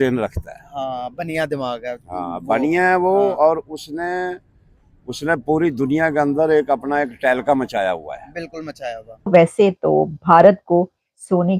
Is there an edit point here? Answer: yes; 1 cut; at 9.2 s

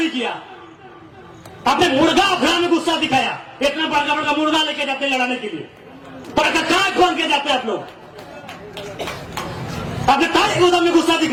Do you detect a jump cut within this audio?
no; 0 cuts

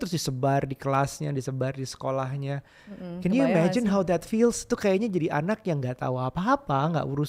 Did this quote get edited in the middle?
no; 0 cuts

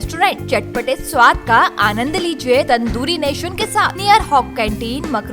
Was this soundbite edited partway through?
yes; 2 cuts; at 2.7 s, 3.9 s

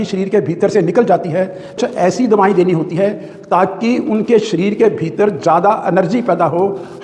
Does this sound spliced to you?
yes; 1 cut; at 1.8 s

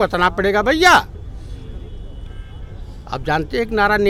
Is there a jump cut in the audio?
no; 0 cuts

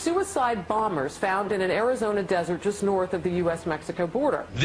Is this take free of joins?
yes; 0 cuts

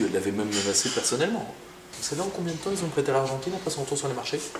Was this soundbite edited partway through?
yes; 1 cut; at 1.9 s

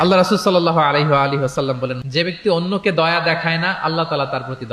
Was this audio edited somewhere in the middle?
yes; 1 cut; at 2.0 s

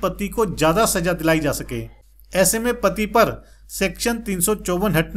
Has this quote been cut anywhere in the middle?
yes; 1 cut; at 1.9 s

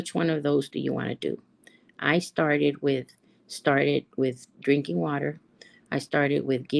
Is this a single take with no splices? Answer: yes; 0 cuts

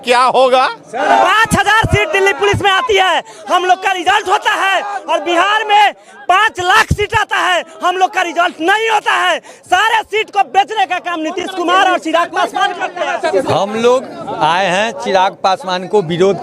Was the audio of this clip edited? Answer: yes; 2 cuts; at 1.0 s, 13.3 s

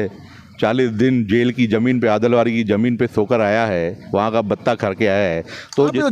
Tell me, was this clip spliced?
no; 0 cuts

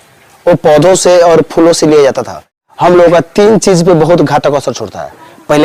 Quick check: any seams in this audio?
yes; 1 cut; at 2.6 s

